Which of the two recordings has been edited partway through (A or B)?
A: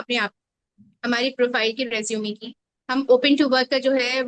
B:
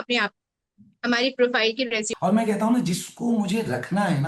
B